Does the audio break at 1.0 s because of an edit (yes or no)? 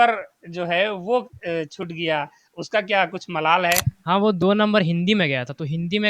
no